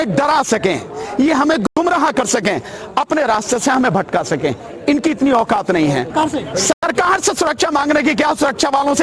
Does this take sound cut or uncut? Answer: cut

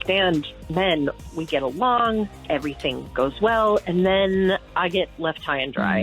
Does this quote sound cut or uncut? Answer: cut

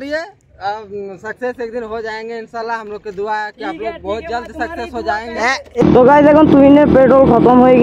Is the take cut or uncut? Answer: cut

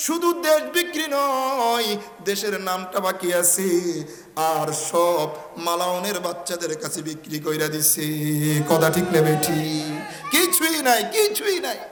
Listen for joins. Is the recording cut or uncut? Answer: uncut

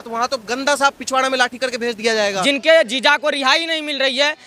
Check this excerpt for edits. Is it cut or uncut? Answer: cut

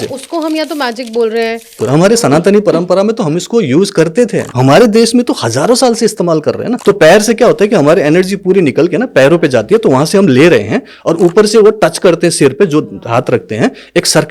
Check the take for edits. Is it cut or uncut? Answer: cut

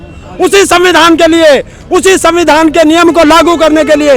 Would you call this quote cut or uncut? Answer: uncut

